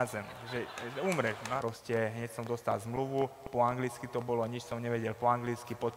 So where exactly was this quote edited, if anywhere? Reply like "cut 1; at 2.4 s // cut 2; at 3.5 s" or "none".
cut 1; at 1.6 s